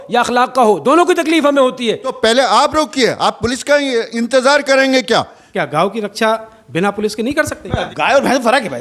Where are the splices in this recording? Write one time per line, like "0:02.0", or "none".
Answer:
0:02.1
0:05.4
0:07.9